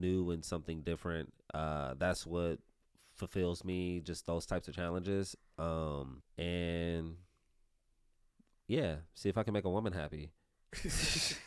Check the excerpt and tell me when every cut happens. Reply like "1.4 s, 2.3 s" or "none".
none